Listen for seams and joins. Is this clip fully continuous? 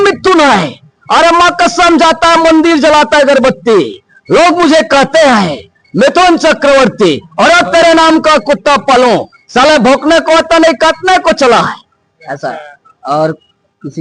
yes; 0 cuts

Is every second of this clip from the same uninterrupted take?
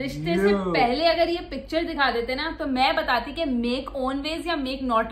yes; 0 cuts

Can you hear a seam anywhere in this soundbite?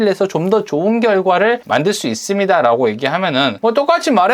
yes; 2 cuts; at 1.6 s, 3.5 s

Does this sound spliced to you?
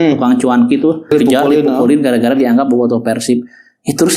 yes; 1 cut; at 1.1 s

